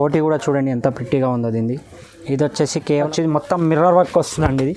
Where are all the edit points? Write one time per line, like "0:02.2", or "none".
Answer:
0:03.1